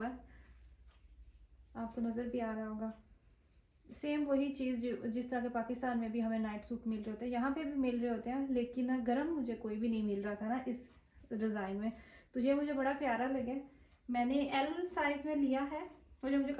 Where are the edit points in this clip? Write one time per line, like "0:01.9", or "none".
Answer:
none